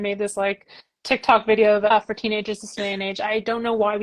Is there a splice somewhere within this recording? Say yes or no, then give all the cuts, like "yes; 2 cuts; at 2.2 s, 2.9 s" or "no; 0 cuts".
yes; 1 cut; at 1.9 s